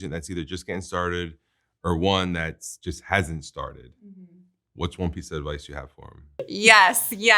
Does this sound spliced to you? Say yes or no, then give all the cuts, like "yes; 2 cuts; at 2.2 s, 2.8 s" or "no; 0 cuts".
yes; 1 cut; at 6.5 s